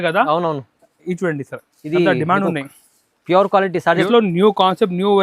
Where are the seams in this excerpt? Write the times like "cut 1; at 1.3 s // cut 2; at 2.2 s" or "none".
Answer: cut 1; at 4.1 s